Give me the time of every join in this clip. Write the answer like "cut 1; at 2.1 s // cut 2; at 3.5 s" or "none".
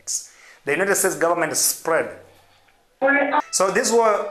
cut 1; at 3.4 s